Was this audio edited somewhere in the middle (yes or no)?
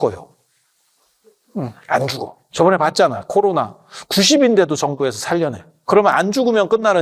yes